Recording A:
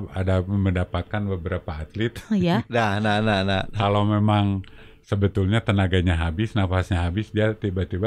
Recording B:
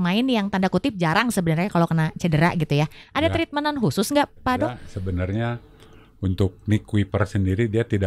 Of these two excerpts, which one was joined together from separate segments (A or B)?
B